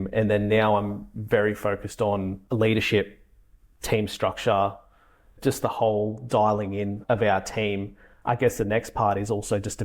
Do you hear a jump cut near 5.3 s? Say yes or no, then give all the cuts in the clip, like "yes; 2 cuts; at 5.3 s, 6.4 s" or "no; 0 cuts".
yes; 4 cuts; at 2.4 s, 5.3 s, 7.0 s, 8.1 s